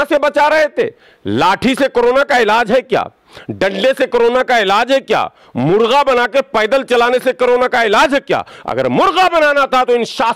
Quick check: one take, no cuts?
yes; 0 cuts

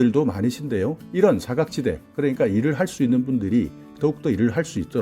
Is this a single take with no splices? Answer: no; 1 cut; at 1.0 s

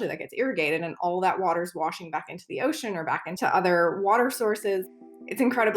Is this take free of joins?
no; 2 cuts; at 3.3 s, 4.9 s

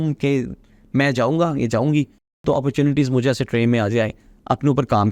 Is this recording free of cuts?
yes; 0 cuts

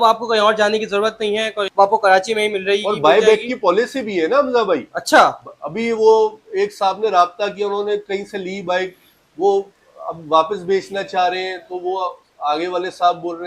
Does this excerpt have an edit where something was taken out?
yes; 1 cut; at 1.7 s

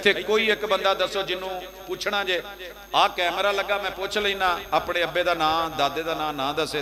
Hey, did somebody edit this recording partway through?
no; 0 cuts

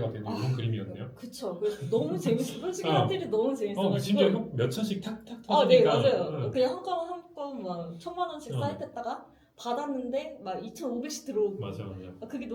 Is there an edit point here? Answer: no; 0 cuts

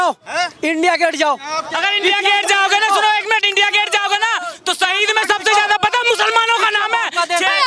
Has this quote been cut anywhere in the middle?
no; 0 cuts

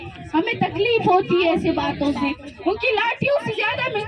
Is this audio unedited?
yes; 0 cuts

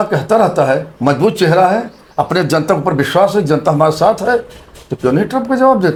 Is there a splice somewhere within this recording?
no; 0 cuts

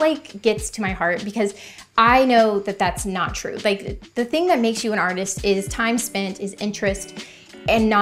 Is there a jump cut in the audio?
no; 0 cuts

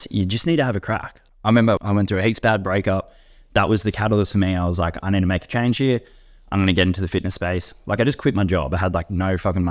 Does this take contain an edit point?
yes; 2 cuts; at 1.1 s, 1.8 s

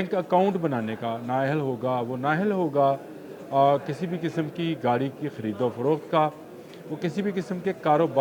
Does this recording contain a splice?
no; 0 cuts

